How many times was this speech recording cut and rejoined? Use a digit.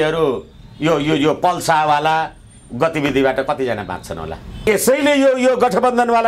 0